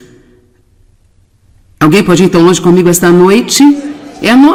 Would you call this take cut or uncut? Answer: uncut